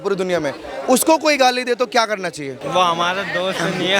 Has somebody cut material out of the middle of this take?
yes; 1 cut; at 2.6 s

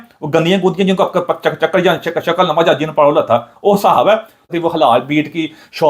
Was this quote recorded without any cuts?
no; 1 cut; at 4.4 s

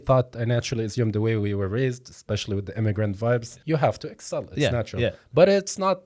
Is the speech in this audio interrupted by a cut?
yes; 1 cut; at 3.5 s

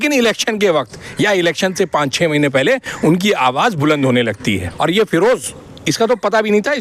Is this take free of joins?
no; 1 cut; at 4.7 s

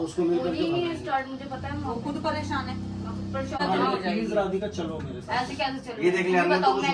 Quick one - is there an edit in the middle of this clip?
yes; 1 cut; at 3.6 s

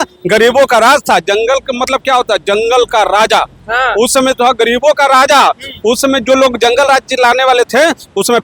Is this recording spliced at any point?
no; 0 cuts

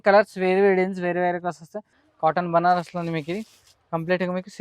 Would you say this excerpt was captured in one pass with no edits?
no; 1 cut; at 2.0 s

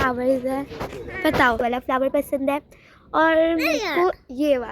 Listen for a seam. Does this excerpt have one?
yes; 1 cut; at 1.6 s

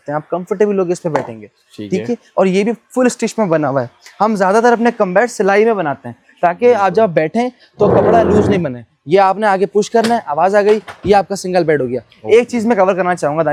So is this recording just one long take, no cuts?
yes; 0 cuts

